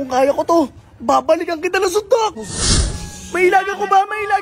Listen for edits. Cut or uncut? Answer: cut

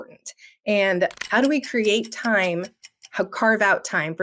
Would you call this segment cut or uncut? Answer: cut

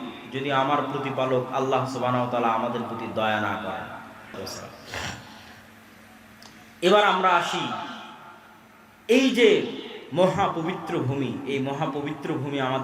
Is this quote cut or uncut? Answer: cut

